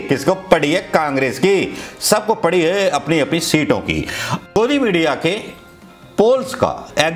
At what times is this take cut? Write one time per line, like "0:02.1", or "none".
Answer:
0:04.3

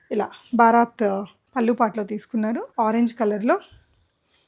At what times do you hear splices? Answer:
0:01.4
0:02.7

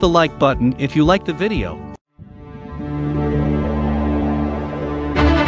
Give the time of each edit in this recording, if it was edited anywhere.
0:01.9

